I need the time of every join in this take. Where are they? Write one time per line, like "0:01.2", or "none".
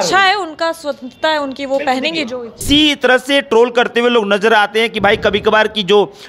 0:02.6